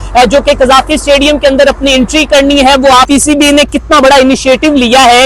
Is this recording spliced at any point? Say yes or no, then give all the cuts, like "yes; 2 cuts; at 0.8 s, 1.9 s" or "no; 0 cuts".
yes; 1 cut; at 3.1 s